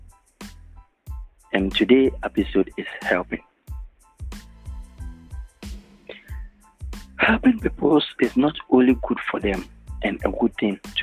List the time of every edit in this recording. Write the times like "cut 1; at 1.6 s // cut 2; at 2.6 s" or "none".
none